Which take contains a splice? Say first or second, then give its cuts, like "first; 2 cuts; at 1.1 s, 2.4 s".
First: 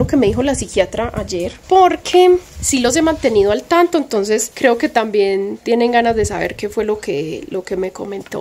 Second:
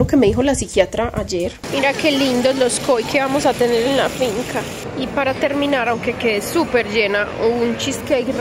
second; 2 cuts; at 1.6 s, 4.8 s